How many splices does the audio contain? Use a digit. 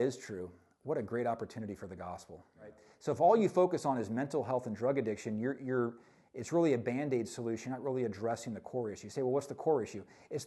1